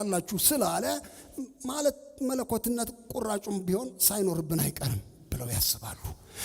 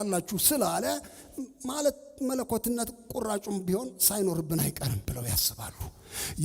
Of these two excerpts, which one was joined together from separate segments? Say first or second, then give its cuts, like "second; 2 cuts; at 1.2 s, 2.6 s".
second; 1 cut; at 5.0 s